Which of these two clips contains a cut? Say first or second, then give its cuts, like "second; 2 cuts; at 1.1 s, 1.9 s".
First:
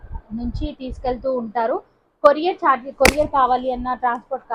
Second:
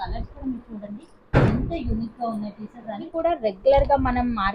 second; 1 cut; at 3.1 s